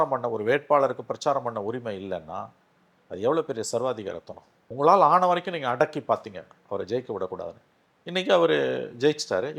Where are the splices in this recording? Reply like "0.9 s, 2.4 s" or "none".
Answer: none